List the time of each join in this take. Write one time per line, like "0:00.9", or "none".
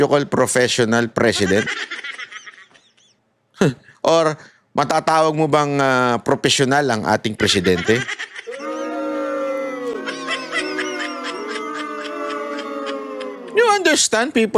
none